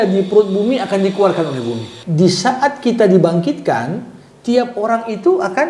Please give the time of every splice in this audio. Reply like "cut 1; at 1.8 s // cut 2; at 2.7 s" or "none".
cut 1; at 1.9 s